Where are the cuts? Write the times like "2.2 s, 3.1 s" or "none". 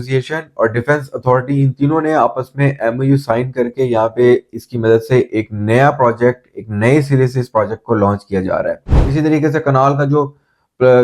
8.9 s